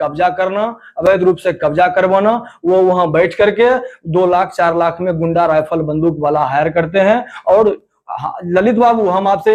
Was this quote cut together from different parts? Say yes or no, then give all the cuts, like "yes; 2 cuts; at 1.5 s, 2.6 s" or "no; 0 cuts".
no; 0 cuts